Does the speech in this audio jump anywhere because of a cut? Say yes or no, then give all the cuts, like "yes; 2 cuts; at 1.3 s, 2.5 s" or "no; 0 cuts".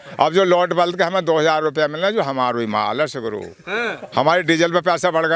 no; 0 cuts